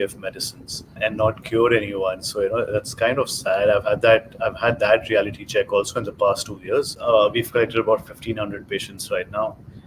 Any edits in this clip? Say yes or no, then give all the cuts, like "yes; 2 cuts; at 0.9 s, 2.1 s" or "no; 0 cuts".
yes; 2 cuts; at 1.0 s, 6.9 s